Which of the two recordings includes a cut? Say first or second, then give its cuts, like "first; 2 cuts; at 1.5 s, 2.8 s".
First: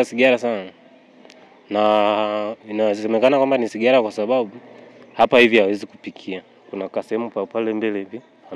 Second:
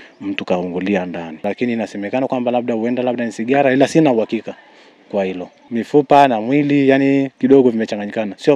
second; 2 cuts; at 1.4 s, 5.5 s